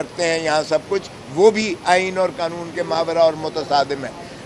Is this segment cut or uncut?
uncut